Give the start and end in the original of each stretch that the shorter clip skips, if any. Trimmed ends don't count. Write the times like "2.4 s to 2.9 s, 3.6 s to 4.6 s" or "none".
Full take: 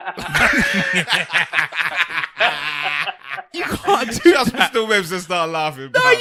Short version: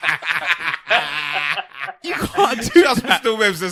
none